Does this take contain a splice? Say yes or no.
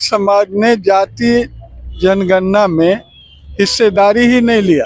no